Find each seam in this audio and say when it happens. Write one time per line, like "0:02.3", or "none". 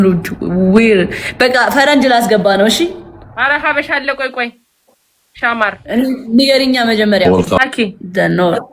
0:07.6